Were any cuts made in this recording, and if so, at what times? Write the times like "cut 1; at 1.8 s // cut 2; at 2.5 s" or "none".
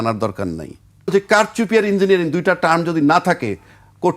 cut 1; at 1.1 s